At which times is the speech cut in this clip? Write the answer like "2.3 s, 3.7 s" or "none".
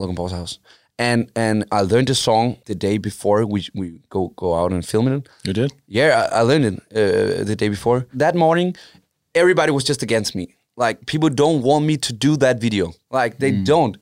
2.6 s, 8.1 s, 13.0 s